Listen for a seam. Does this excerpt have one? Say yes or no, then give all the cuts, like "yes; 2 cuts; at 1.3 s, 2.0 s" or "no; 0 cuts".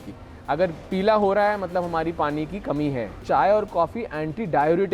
yes; 1 cut; at 3.2 s